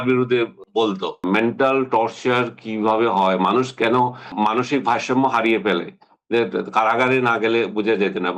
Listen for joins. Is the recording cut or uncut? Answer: cut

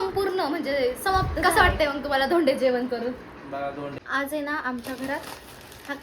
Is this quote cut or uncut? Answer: cut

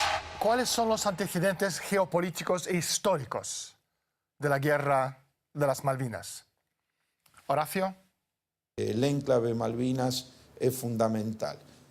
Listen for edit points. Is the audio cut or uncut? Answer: cut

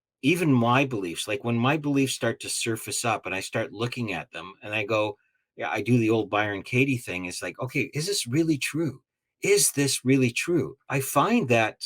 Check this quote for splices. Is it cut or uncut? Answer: cut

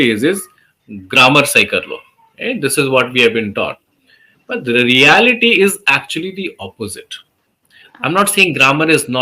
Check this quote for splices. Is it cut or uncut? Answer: cut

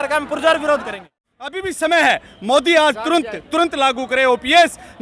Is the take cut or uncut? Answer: cut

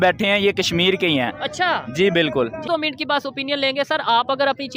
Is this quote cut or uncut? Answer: cut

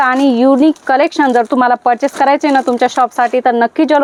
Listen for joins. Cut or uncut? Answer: uncut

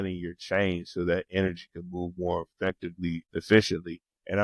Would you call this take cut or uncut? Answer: cut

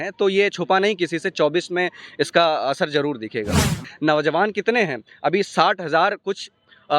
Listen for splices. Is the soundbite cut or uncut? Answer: cut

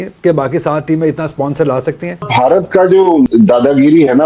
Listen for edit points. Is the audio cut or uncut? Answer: cut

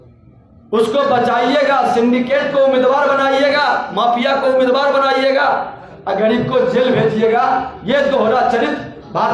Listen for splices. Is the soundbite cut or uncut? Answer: uncut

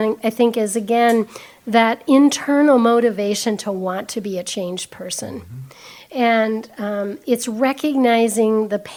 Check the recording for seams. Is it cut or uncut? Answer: uncut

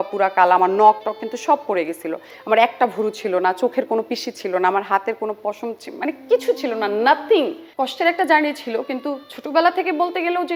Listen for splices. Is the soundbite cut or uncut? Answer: cut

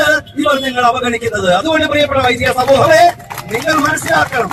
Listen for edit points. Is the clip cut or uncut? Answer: uncut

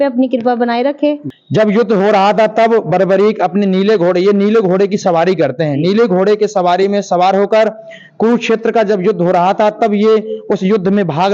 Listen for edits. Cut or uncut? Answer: cut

